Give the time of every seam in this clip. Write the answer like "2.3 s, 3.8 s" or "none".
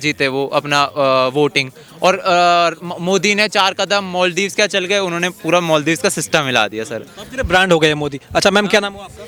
none